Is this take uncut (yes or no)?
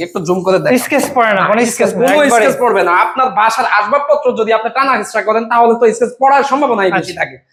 yes